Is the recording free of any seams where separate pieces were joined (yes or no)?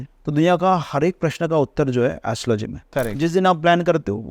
no